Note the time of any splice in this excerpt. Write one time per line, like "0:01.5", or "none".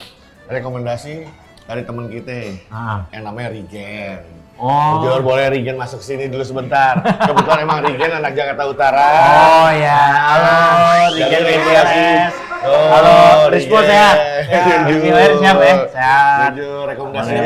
none